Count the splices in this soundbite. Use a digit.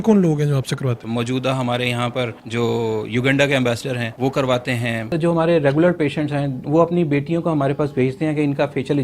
4